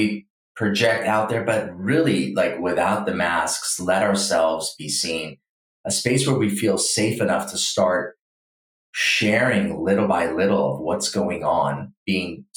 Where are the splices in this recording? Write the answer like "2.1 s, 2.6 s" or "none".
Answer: none